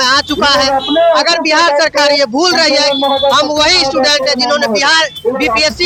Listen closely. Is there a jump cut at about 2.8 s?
no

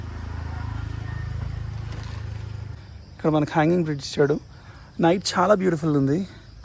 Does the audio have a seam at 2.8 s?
yes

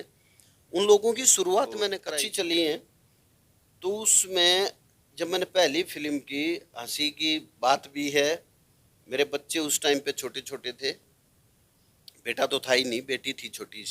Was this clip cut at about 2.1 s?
yes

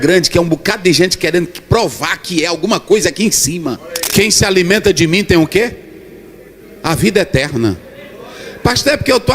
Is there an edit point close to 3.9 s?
yes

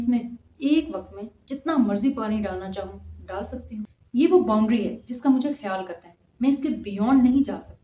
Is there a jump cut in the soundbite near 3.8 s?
no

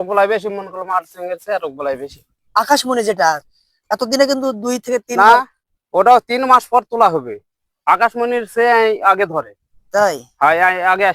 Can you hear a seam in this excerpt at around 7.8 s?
no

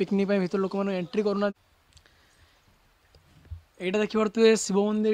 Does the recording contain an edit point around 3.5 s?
no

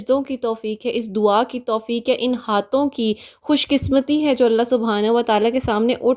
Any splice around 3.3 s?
no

